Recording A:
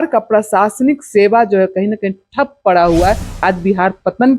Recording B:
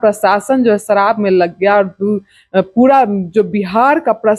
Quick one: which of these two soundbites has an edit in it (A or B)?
A